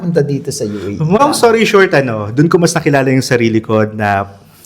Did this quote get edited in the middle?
yes; 1 cut; at 1.2 s

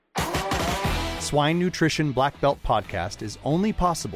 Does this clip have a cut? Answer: yes; 1 cut; at 1.1 s

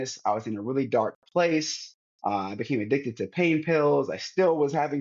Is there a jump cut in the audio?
no; 0 cuts

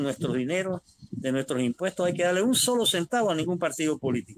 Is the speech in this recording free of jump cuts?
yes; 0 cuts

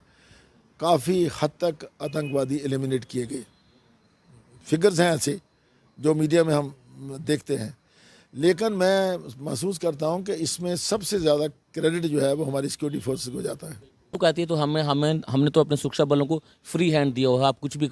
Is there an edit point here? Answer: yes; 1 cut; at 14.2 s

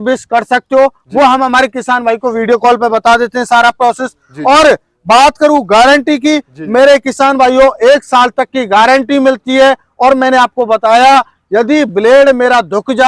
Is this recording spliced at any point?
no; 0 cuts

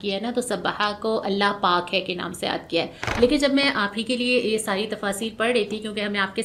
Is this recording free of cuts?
yes; 0 cuts

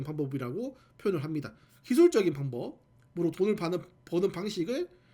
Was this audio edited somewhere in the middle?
yes; 1 cut; at 1.7 s

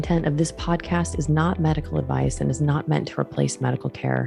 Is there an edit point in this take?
no; 0 cuts

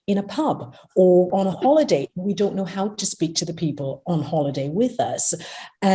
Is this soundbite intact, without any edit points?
no; 1 cut; at 1.3 s

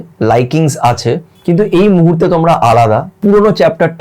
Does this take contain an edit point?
yes; 2 cuts; at 1.3 s, 3.1 s

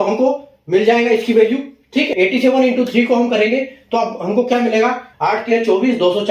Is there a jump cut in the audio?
yes; 2 cuts; at 2.1 s, 5.1 s

